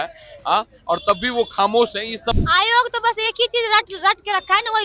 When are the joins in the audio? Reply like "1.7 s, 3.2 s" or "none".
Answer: 2.3 s